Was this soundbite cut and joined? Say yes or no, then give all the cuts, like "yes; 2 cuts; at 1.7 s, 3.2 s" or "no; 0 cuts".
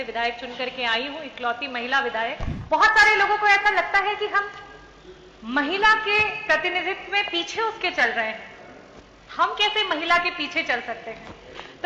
yes; 1 cut; at 2.5 s